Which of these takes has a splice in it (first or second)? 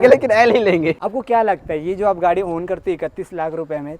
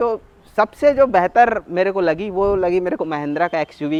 first